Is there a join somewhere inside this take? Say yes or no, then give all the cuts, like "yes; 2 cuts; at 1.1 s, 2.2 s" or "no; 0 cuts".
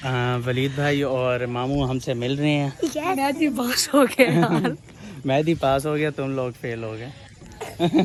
no; 0 cuts